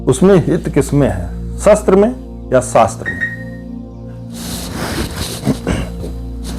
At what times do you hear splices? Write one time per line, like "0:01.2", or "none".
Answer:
none